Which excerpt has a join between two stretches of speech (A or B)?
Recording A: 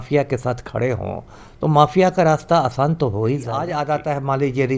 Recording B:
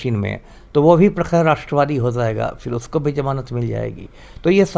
A